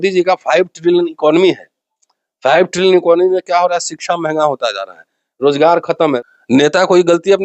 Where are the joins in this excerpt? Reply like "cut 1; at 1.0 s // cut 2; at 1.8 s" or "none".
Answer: cut 1; at 6.2 s